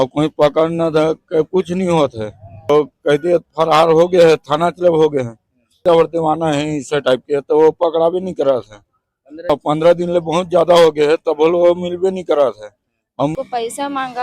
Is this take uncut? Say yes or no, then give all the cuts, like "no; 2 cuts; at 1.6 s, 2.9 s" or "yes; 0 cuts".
no; 4 cuts; at 2.7 s, 5.8 s, 9.5 s, 13.3 s